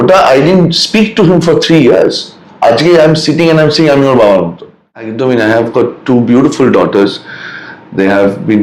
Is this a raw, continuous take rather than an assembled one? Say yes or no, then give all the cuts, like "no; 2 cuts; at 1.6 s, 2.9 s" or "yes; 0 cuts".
no; 1 cut; at 5.1 s